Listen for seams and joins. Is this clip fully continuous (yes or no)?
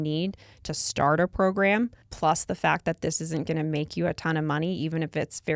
no